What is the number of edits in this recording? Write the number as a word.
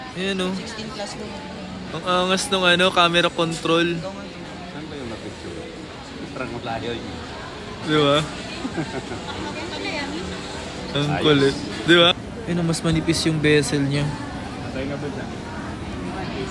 zero